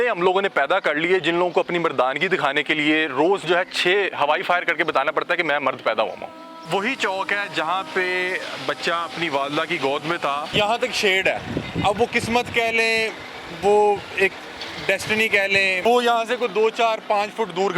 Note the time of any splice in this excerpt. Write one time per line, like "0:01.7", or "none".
0:06.5
0:10.5
0:15.8